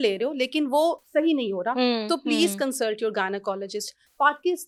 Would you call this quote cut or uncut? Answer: uncut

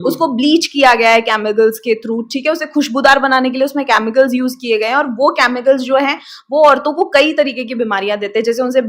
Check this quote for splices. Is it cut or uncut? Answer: uncut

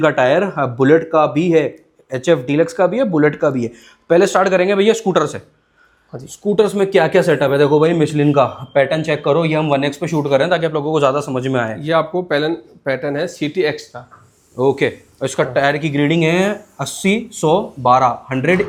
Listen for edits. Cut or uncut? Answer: uncut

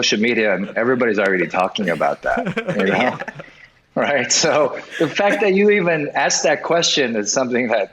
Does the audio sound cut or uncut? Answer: uncut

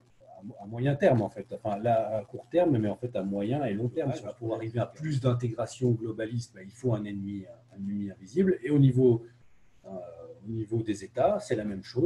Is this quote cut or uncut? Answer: cut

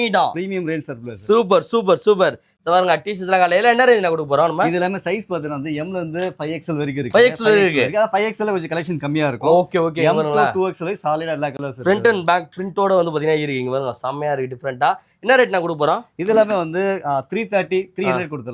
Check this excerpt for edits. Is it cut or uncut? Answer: uncut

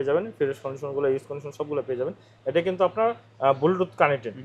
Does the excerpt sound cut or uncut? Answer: uncut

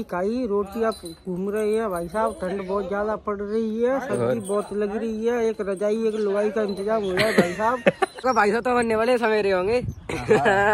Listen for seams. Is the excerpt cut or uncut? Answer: cut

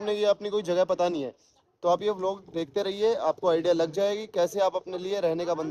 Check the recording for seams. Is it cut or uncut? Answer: uncut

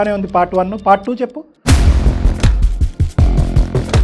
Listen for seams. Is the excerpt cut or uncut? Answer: uncut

